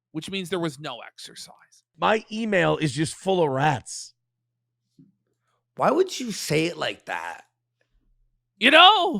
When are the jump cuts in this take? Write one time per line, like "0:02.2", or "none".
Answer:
0:01.9

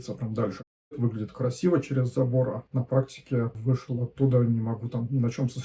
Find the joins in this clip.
0:00.9
0:02.6
0:03.6

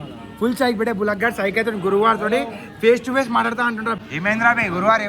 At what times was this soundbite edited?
0:04.0

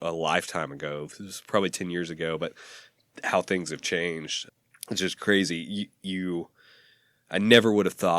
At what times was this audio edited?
0:04.4

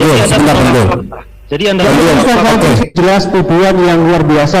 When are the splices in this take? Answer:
0:03.0

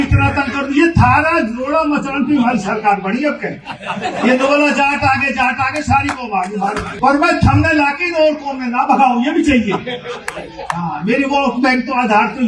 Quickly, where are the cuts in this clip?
0:06.9

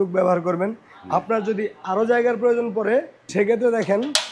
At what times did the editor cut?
0:03.2

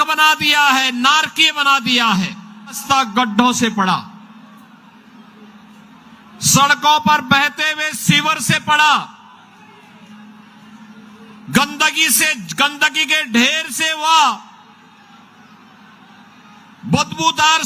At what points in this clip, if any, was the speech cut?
0:02.8

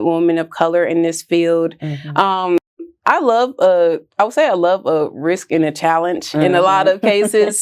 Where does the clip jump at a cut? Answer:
none

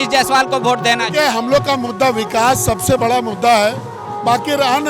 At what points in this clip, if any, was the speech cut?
none

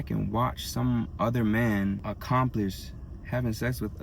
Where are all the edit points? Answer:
0:02.0

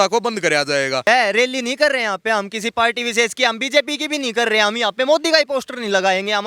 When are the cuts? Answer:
0:01.1

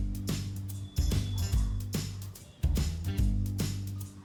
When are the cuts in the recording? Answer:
none

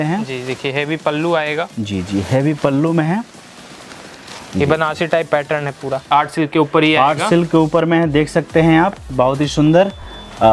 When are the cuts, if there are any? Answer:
0:06.0

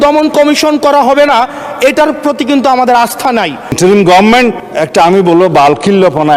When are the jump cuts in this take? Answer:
0:03.8
0:04.6

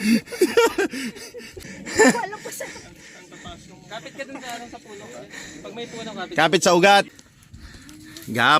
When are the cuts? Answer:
0:01.8
0:07.2

